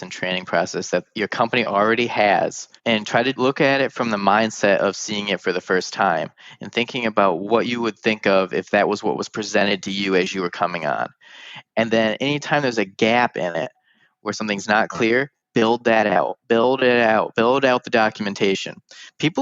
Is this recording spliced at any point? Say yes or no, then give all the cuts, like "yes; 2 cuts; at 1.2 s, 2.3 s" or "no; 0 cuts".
yes; 1 cut; at 3.3 s